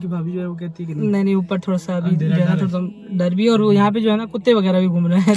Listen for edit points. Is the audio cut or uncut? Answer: uncut